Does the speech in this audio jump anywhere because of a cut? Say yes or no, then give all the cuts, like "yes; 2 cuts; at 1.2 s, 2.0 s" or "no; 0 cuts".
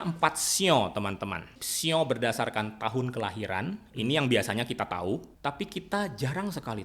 yes; 2 cuts; at 1.6 s, 5.3 s